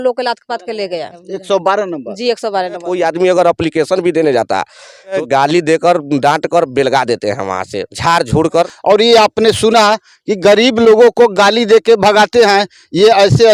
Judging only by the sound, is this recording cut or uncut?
cut